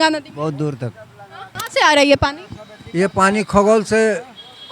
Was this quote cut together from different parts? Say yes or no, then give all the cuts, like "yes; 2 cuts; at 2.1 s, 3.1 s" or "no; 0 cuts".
yes; 1 cut; at 1.6 s